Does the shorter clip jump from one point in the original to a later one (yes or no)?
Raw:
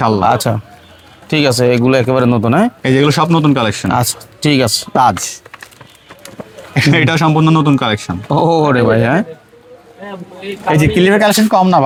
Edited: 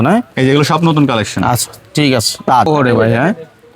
yes